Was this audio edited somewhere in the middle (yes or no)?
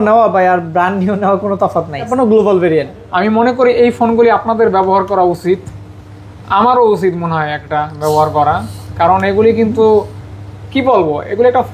yes